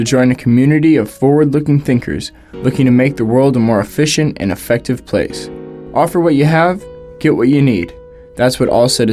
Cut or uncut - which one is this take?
uncut